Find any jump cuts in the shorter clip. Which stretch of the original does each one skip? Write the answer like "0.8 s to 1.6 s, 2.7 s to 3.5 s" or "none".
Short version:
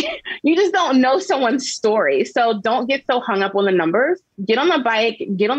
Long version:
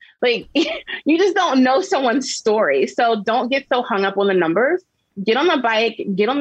4.9 s to 5.1 s